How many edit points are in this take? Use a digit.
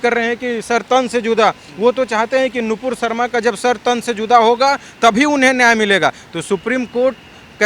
0